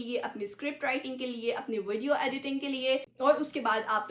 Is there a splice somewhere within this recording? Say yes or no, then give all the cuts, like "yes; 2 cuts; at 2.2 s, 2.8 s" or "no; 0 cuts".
no; 0 cuts